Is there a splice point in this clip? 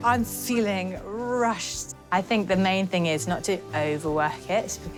no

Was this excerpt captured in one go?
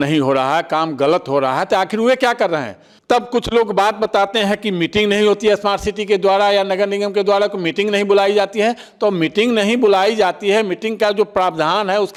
yes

